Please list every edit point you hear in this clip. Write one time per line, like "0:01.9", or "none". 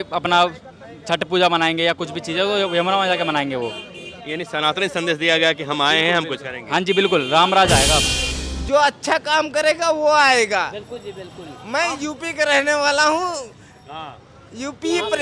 0:08.5